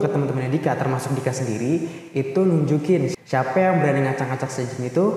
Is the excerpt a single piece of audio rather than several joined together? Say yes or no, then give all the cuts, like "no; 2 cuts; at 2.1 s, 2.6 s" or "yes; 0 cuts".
no; 1 cut; at 3.1 s